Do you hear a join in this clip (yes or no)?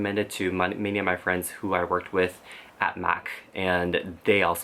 no